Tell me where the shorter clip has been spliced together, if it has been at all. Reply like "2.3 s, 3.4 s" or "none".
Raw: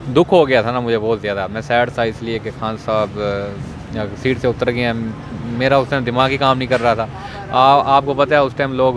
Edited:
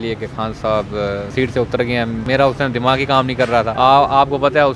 1.3 s, 2.2 s, 3.7 s